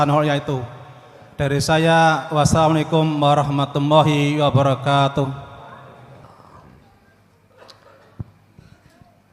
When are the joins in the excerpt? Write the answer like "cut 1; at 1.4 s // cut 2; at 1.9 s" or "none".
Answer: cut 1; at 6.2 s